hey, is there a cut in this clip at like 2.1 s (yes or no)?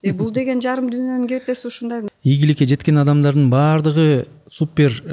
yes